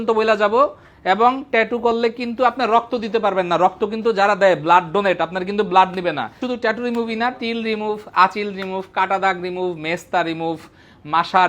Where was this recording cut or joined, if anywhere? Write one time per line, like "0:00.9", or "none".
0:06.4